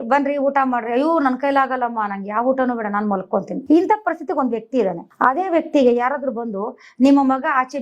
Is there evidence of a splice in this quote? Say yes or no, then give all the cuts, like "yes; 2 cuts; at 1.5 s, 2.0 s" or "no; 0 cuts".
yes; 2 cuts; at 3.6 s, 5.1 s